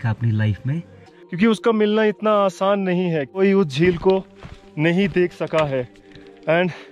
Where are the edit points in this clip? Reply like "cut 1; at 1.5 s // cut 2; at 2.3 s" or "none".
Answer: cut 1; at 1.2 s